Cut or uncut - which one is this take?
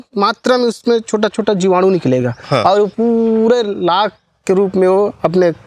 uncut